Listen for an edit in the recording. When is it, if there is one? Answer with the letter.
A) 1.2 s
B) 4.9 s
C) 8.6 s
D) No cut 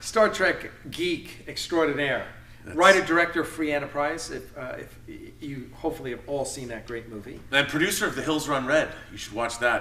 D